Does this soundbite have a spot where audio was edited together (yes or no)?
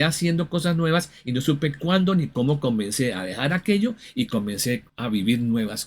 yes